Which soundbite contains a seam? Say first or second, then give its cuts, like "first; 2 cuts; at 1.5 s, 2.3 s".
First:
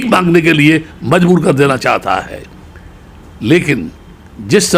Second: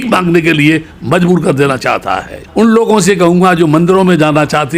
second; 1 cut; at 2.4 s